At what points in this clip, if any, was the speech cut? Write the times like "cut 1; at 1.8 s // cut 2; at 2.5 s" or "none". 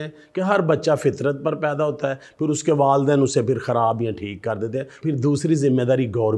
cut 1; at 4.9 s